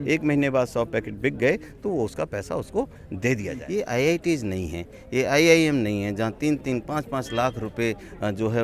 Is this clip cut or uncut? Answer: cut